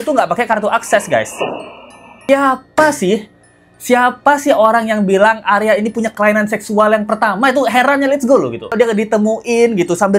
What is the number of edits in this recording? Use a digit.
2